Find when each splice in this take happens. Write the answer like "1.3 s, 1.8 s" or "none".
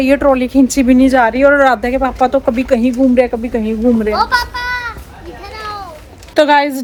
none